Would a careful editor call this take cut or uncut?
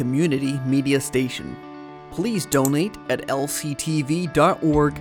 uncut